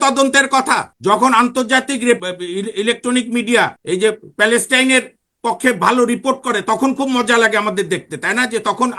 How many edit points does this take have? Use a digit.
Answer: 3